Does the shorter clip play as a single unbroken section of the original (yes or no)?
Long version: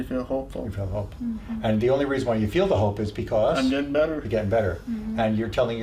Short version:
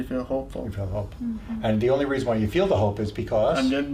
yes